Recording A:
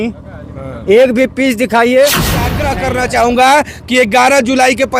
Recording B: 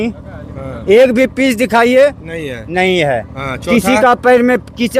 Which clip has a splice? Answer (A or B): A